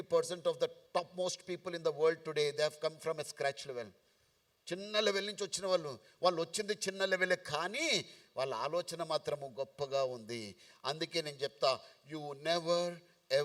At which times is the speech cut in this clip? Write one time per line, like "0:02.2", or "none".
none